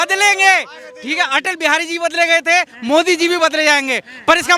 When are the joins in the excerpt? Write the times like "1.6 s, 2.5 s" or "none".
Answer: none